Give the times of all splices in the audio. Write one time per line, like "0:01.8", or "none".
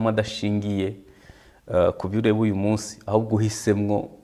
none